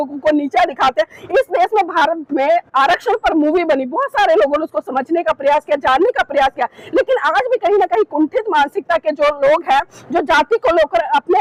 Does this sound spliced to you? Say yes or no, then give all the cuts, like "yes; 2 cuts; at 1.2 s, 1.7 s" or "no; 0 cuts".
no; 0 cuts